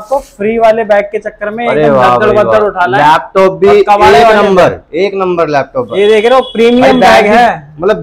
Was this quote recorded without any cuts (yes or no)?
yes